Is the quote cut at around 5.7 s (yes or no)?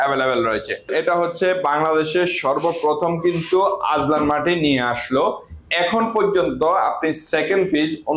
no